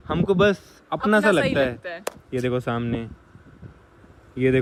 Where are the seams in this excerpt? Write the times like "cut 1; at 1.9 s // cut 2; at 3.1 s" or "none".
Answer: none